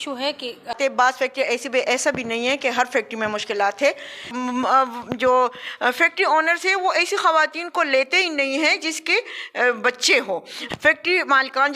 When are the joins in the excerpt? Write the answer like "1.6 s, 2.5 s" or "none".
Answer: 0.7 s, 4.3 s, 10.6 s

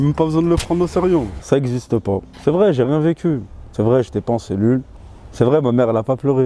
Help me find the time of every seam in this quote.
1.4 s

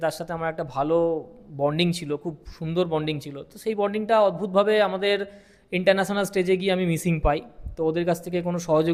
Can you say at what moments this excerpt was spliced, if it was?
none

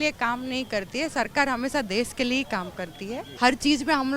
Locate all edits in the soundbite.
3.2 s

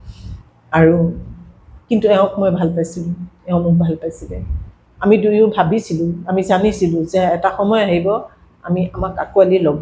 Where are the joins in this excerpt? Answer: none

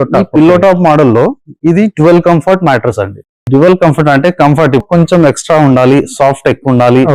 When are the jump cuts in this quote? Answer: 4.9 s

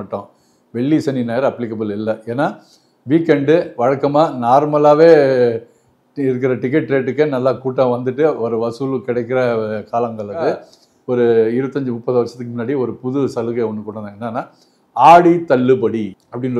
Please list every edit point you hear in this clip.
10.7 s

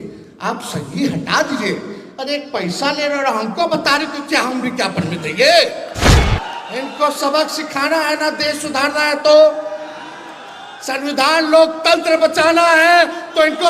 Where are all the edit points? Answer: 6.1 s

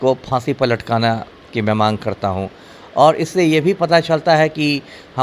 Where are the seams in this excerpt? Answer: none

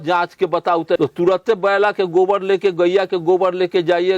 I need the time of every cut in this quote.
1.0 s

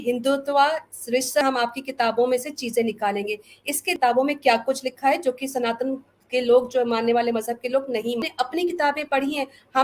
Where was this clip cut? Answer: 1.4 s, 3.9 s, 8.2 s

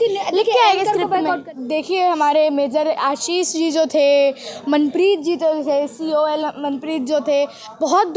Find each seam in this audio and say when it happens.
1.4 s

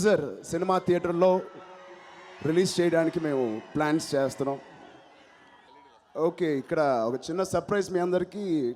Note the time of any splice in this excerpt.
none

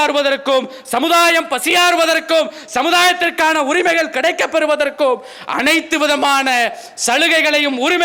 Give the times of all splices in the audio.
none

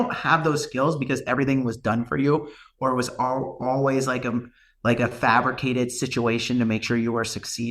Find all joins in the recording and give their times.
none

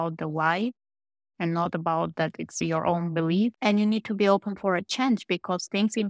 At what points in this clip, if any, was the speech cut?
3.5 s

